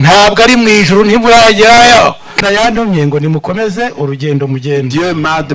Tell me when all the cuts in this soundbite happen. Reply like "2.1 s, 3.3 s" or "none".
2.3 s